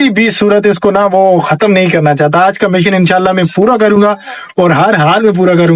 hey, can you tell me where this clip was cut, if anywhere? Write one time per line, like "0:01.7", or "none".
none